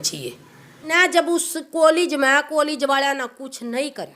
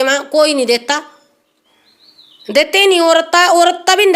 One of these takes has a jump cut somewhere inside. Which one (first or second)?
first